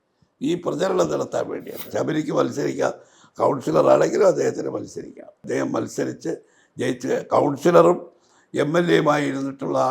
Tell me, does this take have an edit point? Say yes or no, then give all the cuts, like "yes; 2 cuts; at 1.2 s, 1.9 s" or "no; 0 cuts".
yes; 1 cut; at 1.9 s